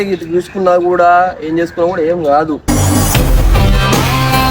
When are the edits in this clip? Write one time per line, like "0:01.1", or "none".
0:02.6